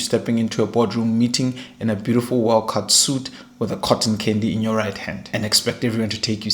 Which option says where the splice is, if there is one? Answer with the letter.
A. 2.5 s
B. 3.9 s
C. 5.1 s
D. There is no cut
C